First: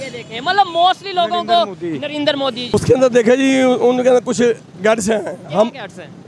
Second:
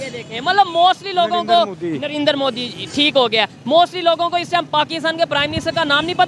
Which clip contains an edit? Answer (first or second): first